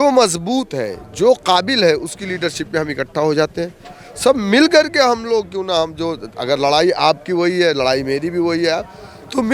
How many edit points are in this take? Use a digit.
0